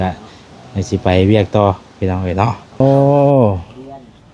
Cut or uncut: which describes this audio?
cut